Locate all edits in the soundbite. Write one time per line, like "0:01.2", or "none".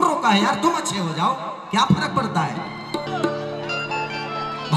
0:03.1